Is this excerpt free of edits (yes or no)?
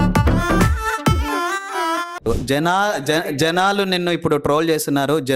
no